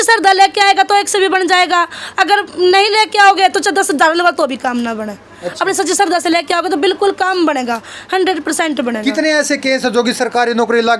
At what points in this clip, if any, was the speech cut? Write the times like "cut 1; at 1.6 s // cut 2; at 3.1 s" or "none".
none